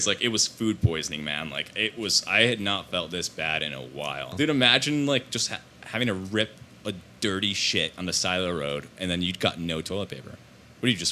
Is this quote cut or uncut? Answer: cut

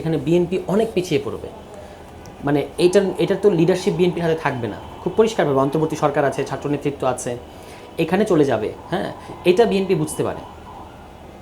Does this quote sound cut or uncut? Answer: uncut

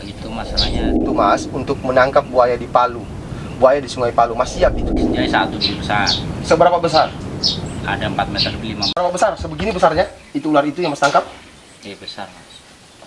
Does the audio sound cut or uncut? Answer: cut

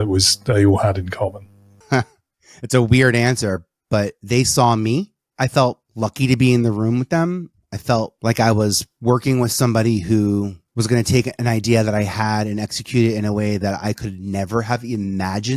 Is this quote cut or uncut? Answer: cut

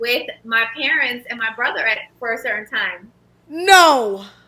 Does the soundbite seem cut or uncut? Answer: uncut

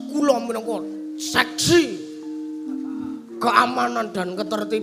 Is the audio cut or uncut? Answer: uncut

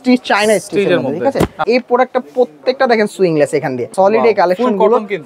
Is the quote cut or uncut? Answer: cut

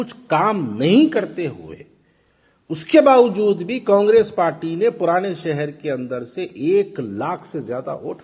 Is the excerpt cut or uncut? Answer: uncut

